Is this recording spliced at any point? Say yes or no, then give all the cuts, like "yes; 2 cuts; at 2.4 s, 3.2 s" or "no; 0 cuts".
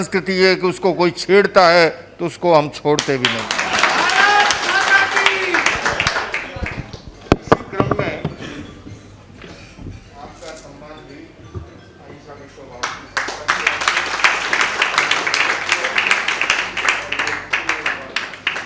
no; 0 cuts